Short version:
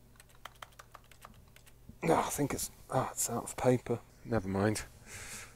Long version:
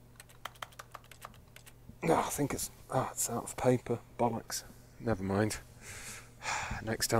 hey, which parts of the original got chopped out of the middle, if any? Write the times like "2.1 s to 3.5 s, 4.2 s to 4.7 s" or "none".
4.1 s to 4.8 s